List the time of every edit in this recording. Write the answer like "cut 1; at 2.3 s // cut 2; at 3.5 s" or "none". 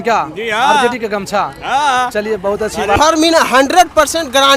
cut 1; at 3.0 s

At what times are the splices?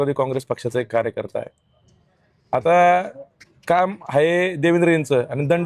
none

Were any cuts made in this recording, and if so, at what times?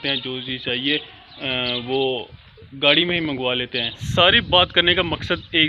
cut 1; at 4.0 s

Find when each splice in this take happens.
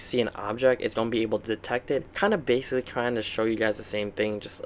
cut 1; at 2.1 s

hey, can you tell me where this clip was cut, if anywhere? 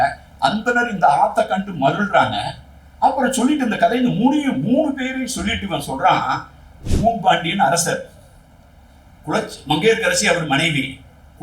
cut 1; at 6.7 s

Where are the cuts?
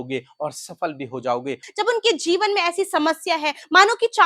cut 1; at 1.6 s

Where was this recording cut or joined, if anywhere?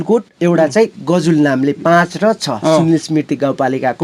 none

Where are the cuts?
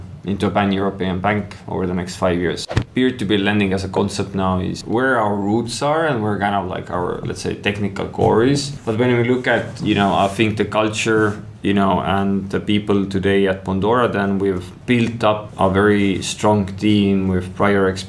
cut 1; at 2.6 s // cut 2; at 4.8 s // cut 3; at 8.7 s // cut 4; at 14.7 s // cut 5; at 15.5 s

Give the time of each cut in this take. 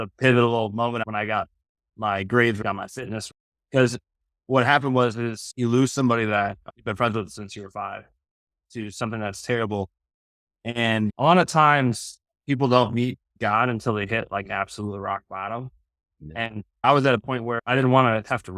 cut 1; at 1.0 s // cut 2; at 8.5 s // cut 3; at 11.1 s // cut 4; at 17.6 s

